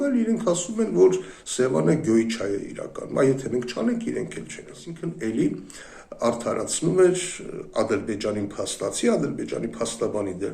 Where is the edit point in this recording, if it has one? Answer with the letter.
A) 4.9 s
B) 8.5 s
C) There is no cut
A